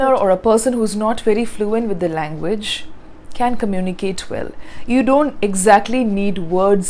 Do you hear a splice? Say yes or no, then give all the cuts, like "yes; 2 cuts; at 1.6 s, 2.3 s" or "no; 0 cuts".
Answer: no; 0 cuts